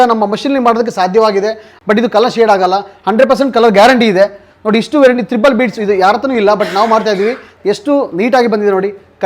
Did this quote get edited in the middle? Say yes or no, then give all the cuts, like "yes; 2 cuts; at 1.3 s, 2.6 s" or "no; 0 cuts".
yes; 2 cuts; at 1.7 s, 7.5 s